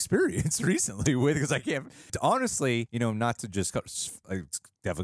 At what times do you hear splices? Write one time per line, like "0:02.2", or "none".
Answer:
0:02.1
0:02.9
0:04.2